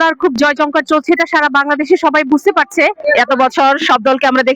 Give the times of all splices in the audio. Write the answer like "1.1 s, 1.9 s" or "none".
3.0 s